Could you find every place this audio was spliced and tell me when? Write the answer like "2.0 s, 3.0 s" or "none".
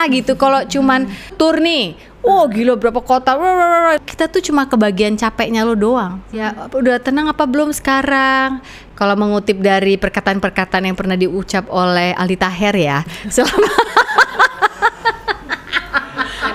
1.3 s, 4.0 s, 6.5 s